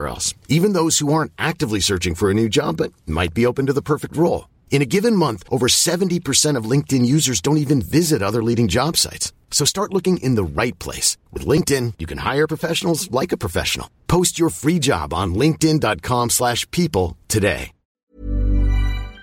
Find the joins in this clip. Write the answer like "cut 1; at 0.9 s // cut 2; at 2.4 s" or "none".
cut 1; at 18.0 s